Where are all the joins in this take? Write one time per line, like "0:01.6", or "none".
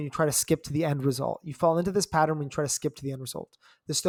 none